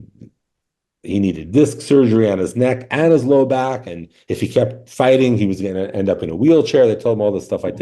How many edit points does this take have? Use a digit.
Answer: 0